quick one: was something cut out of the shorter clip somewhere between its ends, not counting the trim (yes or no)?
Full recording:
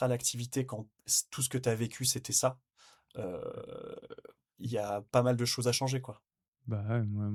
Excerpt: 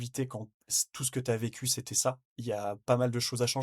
yes